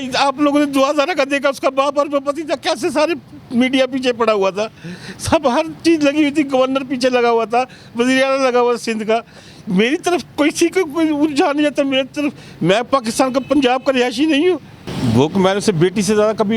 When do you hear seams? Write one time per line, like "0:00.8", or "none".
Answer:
0:14.9